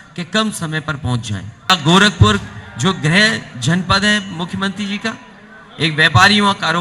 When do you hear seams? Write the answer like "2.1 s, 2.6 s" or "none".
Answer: 1.7 s